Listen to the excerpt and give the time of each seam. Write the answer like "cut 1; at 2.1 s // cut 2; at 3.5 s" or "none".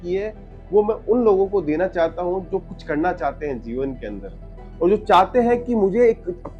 none